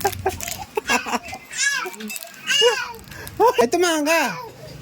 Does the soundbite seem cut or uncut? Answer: cut